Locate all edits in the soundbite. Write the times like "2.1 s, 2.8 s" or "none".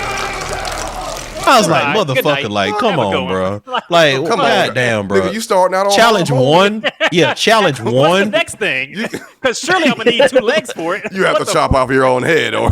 none